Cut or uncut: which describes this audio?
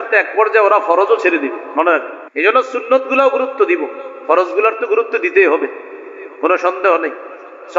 cut